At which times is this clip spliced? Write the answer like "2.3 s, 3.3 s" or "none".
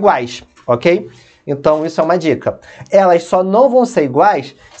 none